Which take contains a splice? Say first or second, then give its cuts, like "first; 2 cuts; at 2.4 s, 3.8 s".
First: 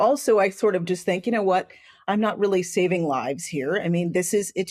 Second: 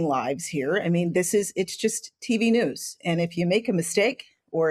first; 1 cut; at 1.9 s